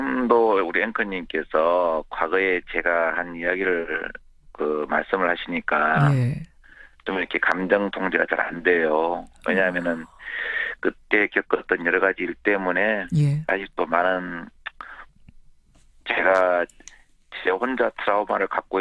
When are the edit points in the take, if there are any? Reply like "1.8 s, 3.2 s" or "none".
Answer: none